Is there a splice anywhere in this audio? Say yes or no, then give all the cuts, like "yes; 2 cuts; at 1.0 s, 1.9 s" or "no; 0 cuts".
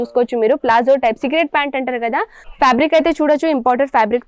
yes; 1 cut; at 2.4 s